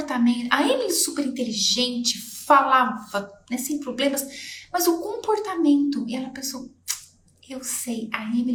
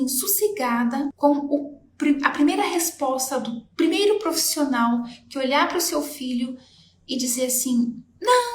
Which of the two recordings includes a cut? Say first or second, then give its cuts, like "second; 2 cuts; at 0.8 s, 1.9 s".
second; 1 cut; at 1.1 s